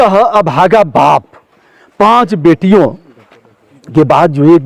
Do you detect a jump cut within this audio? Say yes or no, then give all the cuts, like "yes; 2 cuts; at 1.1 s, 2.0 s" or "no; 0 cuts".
no; 0 cuts